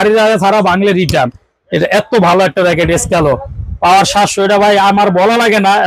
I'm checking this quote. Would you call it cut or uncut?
uncut